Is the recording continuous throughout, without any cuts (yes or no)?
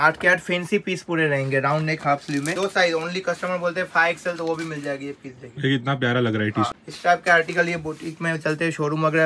no